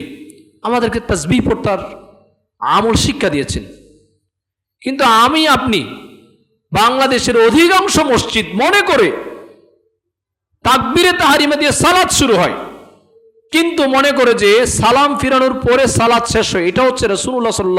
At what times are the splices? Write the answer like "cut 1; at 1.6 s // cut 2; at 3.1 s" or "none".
none